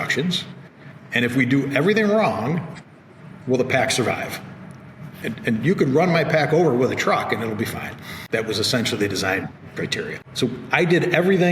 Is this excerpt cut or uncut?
cut